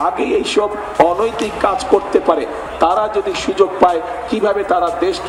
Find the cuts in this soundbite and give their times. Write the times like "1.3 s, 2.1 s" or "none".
none